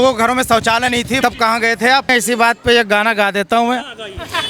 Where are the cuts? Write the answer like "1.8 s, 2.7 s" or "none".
1.2 s, 2.1 s